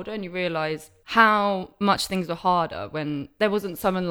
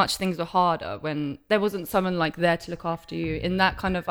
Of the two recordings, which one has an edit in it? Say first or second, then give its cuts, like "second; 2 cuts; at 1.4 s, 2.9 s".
first; 1 cut; at 0.9 s